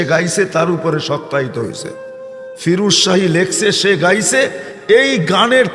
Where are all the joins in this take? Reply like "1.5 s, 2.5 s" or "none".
4.3 s